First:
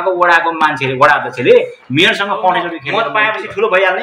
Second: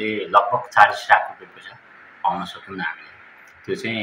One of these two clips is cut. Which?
first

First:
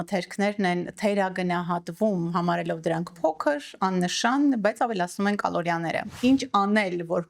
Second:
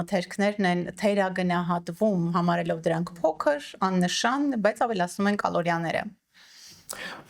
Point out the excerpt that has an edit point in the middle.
first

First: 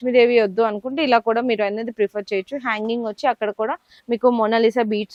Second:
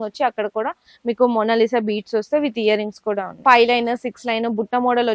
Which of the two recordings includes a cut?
second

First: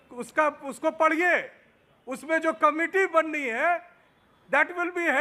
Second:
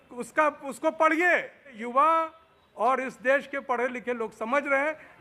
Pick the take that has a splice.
second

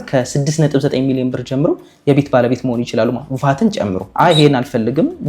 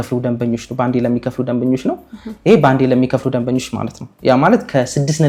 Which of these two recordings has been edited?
first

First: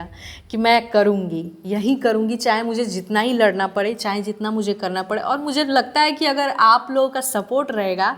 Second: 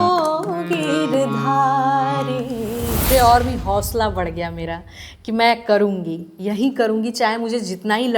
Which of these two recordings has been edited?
second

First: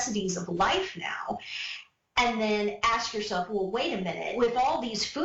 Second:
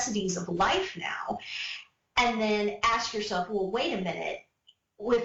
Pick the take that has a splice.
first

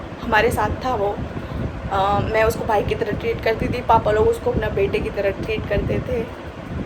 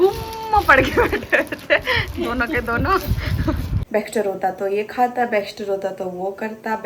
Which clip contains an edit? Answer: second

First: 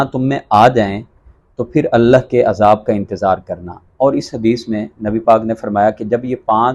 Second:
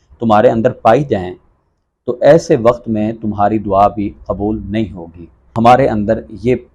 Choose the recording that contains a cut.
second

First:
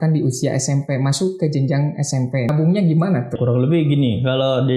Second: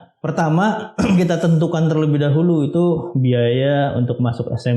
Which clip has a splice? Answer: first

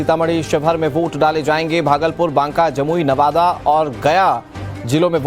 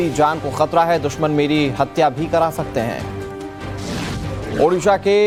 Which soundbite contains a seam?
first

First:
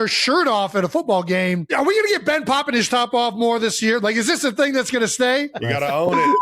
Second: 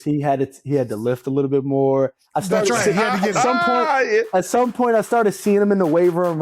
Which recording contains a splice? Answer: first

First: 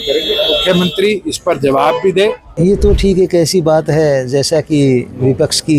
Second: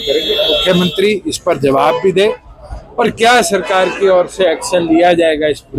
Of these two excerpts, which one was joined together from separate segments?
first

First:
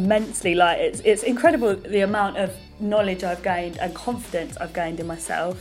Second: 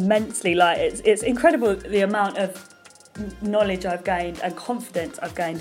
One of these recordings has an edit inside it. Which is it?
first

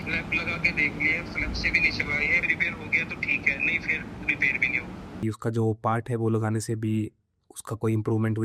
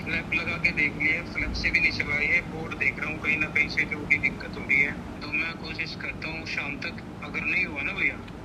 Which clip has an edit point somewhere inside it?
first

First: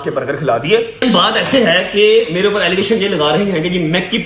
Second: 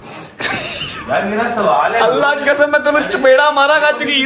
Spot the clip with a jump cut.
first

